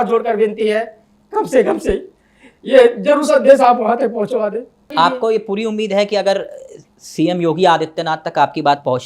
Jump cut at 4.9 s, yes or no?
yes